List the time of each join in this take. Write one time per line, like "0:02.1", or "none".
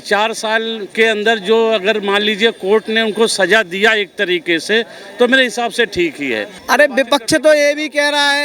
0:06.5

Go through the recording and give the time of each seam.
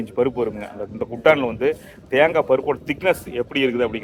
none

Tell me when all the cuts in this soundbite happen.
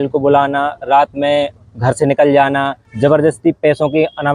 0:02.8

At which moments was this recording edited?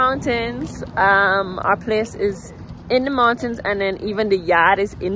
none

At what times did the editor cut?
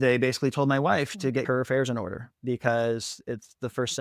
0:01.4

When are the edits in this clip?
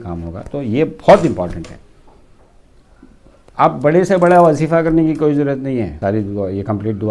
0:06.0

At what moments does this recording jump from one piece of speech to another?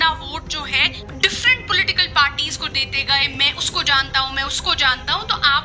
0:01.0

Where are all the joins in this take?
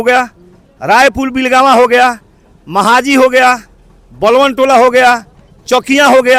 none

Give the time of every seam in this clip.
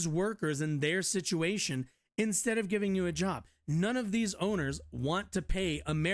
none

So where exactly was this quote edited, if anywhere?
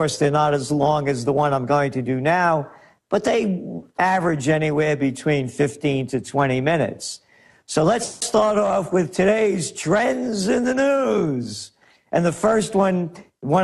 0:12.7

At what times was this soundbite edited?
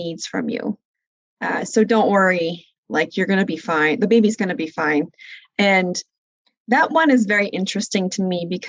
0:01.1

